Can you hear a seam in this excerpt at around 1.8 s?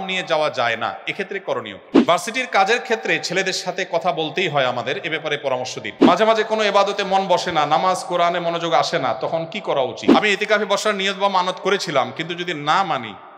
yes; 3 cuts; at 1.8 s, 6.1 s, 10.0 s

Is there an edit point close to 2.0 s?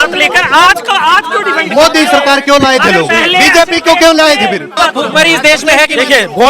no; 1 cut; at 4.7 s

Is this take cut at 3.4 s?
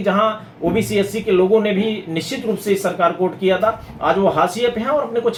no; 0 cuts

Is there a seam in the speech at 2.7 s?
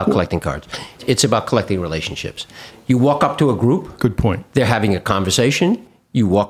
yes; 2 cuts; at 1.0 s, 2.7 s

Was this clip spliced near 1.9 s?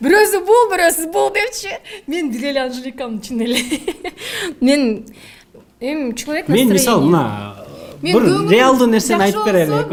no; 0 cuts

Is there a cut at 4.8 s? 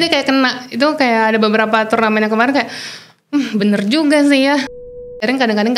yes; 1 cut; at 4.8 s

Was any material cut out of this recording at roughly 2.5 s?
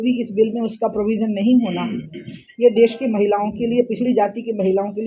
no; 0 cuts

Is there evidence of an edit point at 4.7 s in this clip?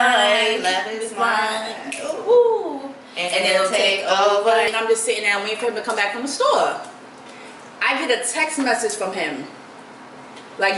yes; 1 cut; at 4.7 s

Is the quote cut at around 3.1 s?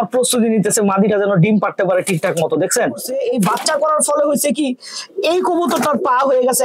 yes; 1 cut; at 3.1 s

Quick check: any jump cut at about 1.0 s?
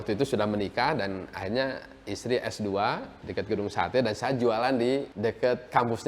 no; 2 cuts; at 3.2 s, 5.1 s

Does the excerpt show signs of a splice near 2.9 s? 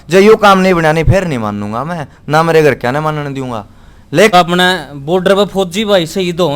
no; 1 cut; at 4.3 s

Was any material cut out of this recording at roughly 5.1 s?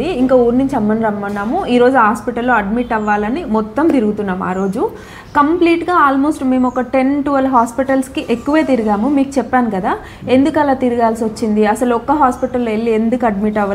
no; 0 cuts

